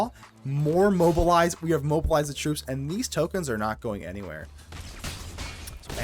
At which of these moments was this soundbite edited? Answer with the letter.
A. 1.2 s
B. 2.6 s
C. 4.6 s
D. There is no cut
C